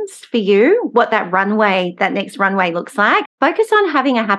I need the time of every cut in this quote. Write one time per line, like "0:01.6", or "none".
0:03.3